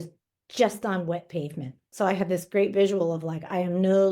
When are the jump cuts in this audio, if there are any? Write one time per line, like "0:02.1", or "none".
0:01.8